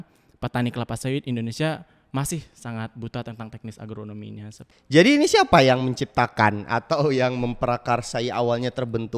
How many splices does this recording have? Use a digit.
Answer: 1